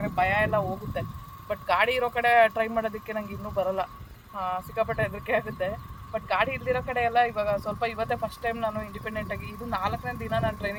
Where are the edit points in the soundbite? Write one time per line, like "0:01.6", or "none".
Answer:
none